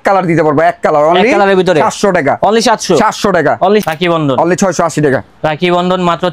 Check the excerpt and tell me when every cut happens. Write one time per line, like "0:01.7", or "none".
0:03.8

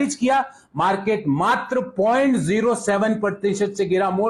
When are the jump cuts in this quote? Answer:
none

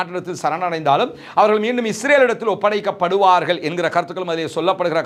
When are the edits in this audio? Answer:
none

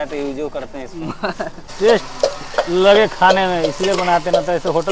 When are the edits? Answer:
0:01.8

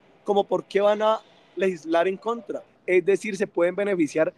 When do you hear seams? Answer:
0:02.7

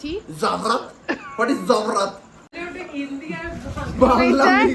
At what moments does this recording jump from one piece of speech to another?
0:02.5

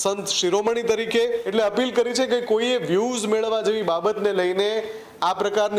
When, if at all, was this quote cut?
0:01.4

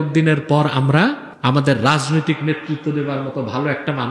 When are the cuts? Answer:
0:01.3

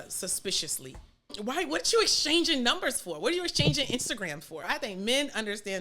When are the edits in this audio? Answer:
0:01.4
0:04.7

